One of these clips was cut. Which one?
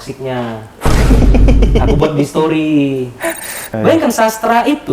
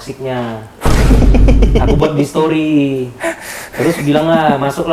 first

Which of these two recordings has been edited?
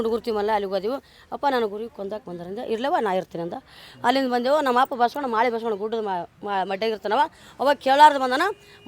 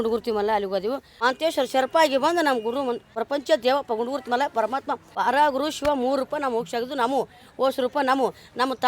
second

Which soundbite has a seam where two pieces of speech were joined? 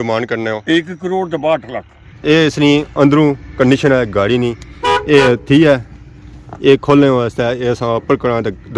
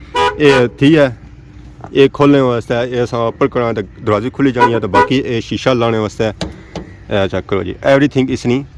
first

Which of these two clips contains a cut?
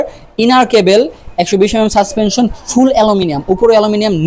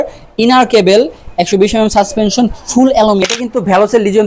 second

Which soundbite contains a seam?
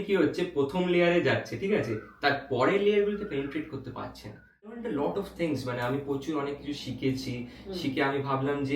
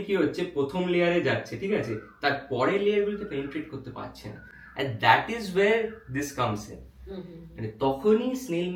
first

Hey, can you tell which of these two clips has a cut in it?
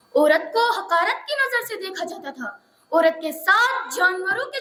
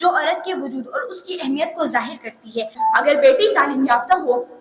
second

